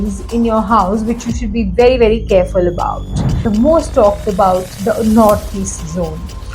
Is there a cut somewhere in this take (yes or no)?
yes